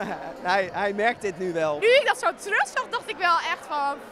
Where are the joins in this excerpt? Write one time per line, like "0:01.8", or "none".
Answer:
0:01.8